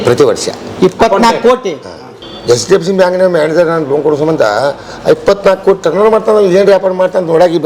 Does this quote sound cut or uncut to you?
cut